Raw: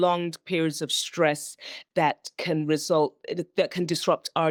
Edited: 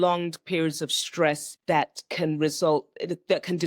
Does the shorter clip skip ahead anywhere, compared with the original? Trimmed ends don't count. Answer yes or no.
yes